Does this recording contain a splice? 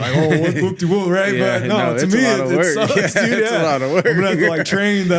no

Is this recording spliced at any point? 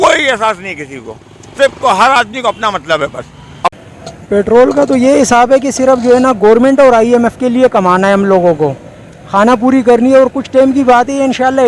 yes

